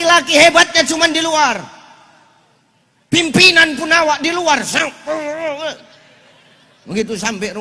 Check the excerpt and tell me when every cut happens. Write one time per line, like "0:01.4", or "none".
none